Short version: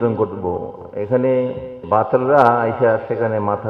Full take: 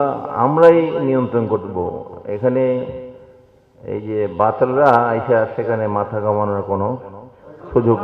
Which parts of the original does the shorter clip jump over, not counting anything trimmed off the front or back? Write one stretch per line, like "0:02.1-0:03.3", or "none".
0:03.2-0:04.3